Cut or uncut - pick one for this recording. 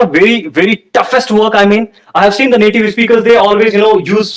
uncut